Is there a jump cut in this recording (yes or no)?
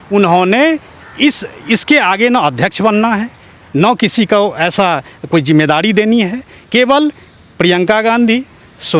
no